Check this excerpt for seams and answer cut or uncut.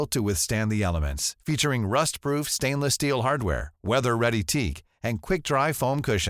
uncut